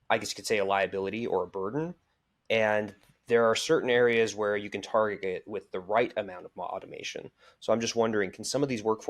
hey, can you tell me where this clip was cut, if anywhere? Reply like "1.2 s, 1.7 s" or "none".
none

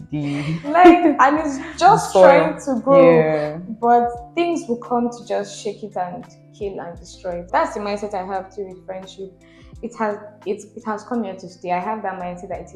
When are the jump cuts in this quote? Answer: 7.5 s

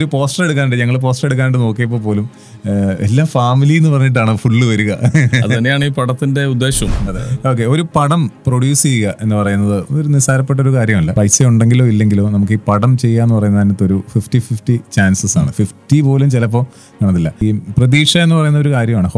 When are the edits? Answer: 7.1 s, 11.1 s, 17.4 s

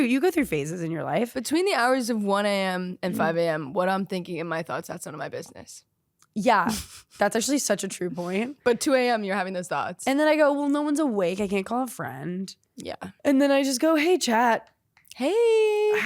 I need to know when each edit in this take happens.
10.0 s, 13.1 s

